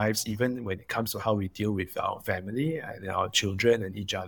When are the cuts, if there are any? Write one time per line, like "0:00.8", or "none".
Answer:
none